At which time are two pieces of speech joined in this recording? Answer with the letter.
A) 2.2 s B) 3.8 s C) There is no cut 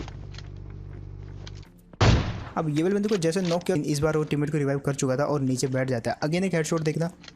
B